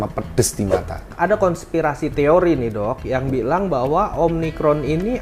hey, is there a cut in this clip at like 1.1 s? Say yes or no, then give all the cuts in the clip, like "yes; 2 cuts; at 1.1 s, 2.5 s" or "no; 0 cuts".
yes; 1 cut; at 1.1 s